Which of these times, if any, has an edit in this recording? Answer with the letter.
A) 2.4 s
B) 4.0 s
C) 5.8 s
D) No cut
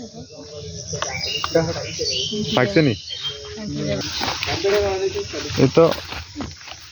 B